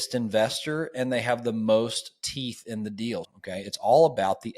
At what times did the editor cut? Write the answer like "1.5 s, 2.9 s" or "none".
3.3 s